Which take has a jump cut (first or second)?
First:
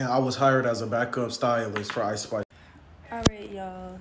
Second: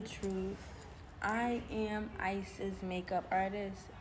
first